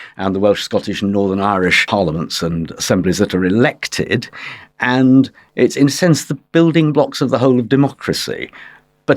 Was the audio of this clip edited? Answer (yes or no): yes